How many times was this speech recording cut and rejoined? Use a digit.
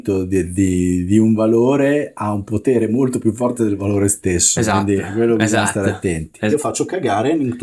1